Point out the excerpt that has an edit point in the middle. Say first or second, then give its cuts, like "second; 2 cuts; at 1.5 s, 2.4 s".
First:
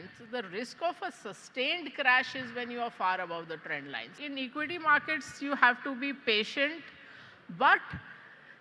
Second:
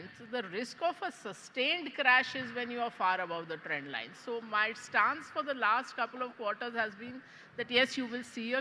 first; 1 cut; at 4.2 s